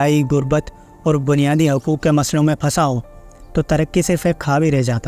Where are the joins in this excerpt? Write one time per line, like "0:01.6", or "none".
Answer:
none